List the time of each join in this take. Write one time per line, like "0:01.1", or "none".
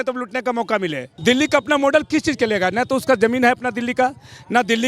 0:01.1